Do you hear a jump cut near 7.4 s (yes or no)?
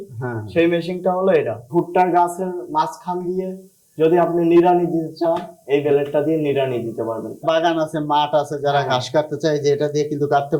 yes